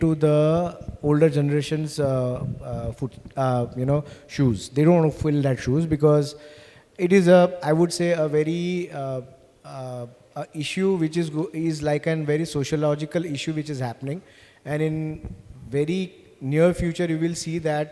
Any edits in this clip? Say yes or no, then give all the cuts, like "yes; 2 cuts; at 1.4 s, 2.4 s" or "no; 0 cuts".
no; 0 cuts